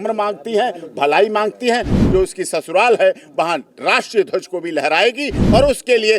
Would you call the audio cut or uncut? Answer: cut